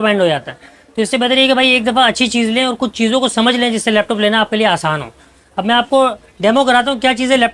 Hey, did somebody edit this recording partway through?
no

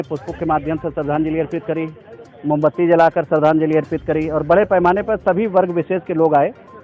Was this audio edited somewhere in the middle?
no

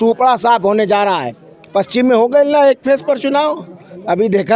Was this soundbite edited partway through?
no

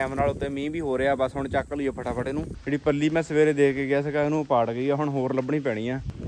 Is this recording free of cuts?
yes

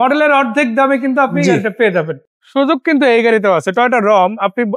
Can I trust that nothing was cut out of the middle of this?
no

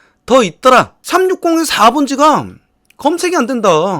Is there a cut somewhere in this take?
yes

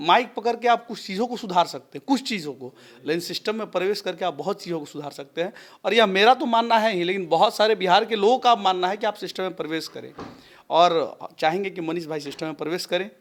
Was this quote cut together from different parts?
no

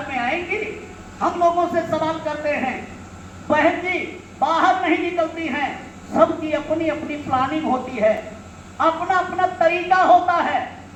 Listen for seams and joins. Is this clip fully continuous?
yes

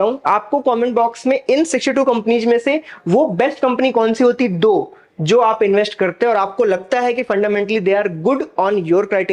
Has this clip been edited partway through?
no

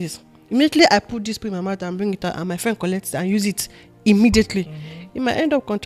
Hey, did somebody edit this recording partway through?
no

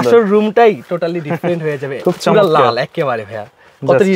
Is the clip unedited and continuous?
yes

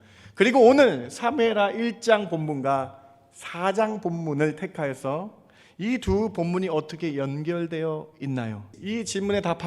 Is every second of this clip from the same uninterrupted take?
no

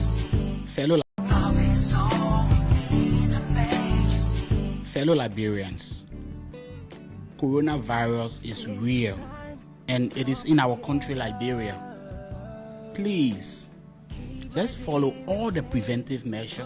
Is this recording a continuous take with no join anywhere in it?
no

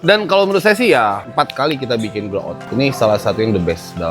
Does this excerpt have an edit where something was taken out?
yes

